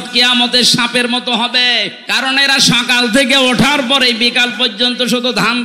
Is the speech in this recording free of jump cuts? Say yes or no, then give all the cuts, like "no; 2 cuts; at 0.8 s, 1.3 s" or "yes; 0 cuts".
no; 1 cut; at 2.0 s